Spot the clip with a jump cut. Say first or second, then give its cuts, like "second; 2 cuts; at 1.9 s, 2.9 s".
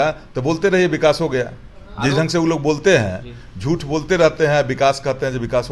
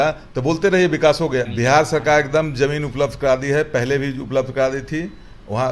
second; 1 cut; at 1.5 s